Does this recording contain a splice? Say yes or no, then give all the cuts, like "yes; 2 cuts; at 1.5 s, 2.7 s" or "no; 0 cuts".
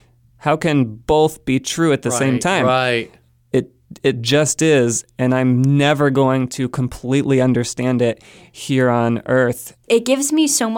yes; 1 cut; at 9.8 s